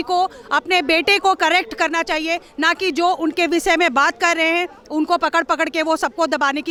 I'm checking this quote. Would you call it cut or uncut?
uncut